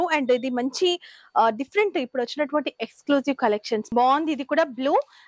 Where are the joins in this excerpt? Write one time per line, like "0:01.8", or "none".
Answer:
0:03.9